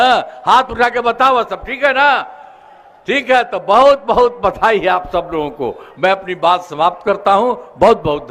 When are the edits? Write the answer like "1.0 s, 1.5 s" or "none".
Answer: none